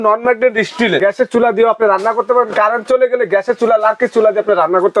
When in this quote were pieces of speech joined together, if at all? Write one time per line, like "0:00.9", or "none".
0:01.0